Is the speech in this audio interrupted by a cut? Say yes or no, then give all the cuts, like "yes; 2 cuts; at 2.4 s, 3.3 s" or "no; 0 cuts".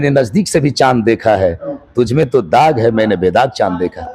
no; 0 cuts